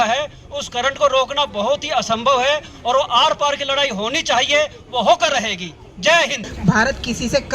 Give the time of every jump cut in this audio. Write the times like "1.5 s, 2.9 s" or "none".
6.5 s